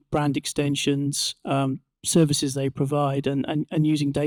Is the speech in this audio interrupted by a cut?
no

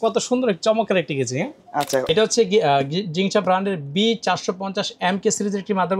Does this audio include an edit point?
yes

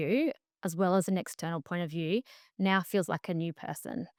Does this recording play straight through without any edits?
yes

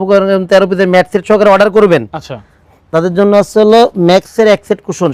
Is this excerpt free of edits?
yes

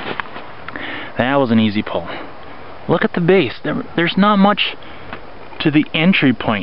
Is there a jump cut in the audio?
no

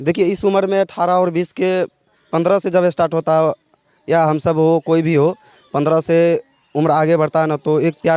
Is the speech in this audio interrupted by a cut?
no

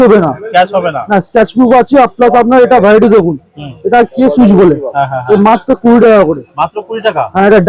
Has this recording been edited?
no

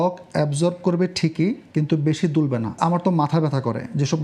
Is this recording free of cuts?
no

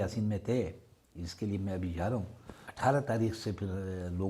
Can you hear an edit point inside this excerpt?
yes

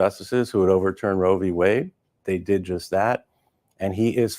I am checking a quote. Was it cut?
yes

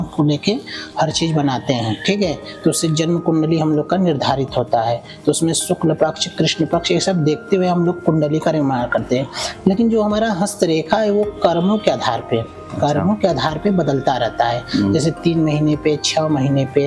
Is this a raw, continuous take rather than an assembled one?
yes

